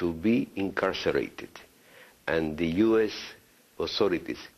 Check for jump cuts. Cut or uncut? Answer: uncut